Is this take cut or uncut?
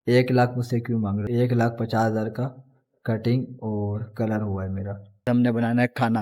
cut